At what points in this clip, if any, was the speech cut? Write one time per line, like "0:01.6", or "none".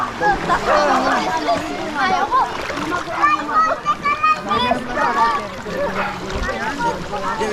none